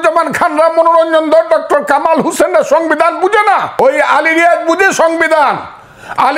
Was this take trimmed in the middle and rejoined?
yes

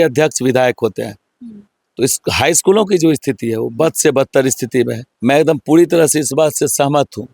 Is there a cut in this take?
yes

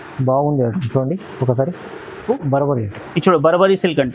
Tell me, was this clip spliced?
yes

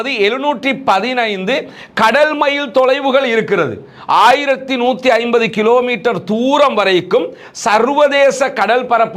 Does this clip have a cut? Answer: no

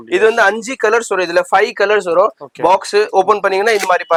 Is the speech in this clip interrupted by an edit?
no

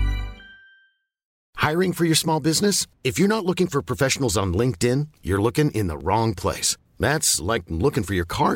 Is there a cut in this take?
yes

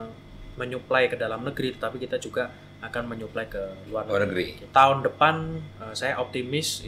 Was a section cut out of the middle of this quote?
yes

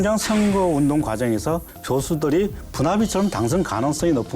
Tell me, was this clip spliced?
yes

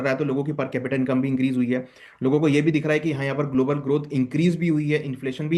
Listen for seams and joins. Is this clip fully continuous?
yes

